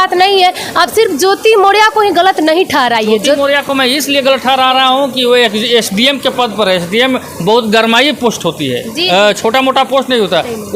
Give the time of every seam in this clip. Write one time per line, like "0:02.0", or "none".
none